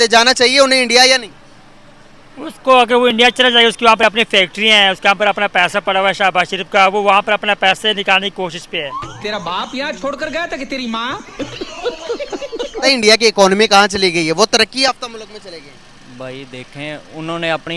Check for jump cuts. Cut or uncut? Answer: cut